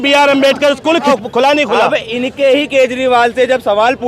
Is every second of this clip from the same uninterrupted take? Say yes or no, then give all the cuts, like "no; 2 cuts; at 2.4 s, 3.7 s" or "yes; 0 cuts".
no; 1 cut; at 1.1 s